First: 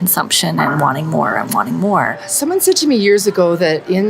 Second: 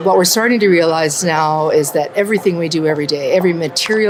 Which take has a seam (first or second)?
first